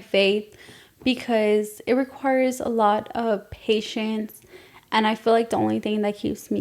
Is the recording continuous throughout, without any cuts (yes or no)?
yes